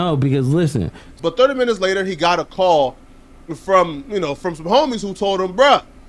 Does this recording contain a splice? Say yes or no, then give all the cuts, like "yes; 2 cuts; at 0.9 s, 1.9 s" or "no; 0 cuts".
no; 0 cuts